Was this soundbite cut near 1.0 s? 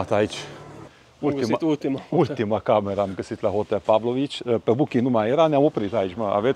yes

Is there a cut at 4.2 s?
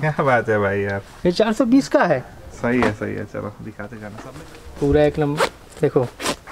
yes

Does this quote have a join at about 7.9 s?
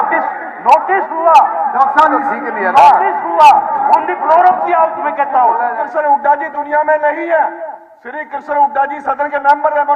no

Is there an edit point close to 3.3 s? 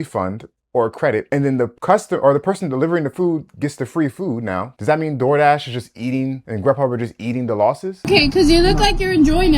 no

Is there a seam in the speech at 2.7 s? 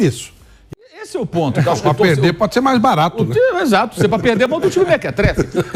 no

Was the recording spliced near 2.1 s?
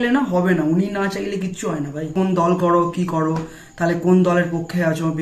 yes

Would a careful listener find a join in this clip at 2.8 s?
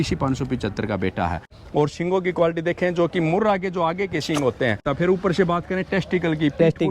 no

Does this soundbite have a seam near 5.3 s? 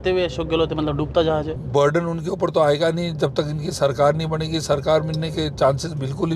no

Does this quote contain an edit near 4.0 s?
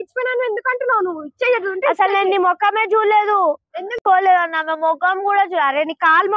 yes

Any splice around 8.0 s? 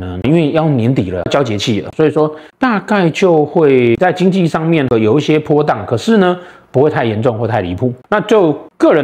yes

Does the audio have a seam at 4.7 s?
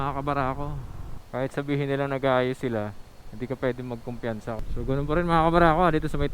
yes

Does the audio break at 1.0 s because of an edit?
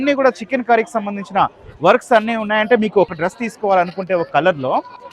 no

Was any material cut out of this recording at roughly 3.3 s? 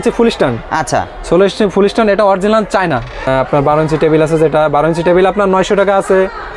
yes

